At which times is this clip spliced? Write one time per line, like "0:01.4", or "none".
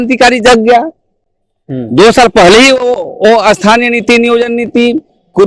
none